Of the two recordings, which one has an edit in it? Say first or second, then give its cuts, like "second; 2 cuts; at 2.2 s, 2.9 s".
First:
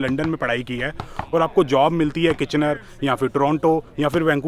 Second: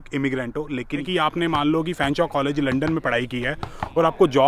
second; 1 cut; at 1.0 s